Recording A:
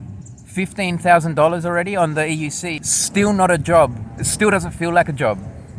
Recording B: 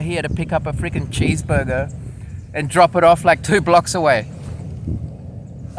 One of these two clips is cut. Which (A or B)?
A